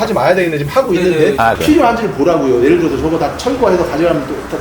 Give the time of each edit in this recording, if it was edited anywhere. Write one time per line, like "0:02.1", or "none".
0:01.6